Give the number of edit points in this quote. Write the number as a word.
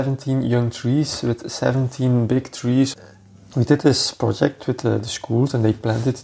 one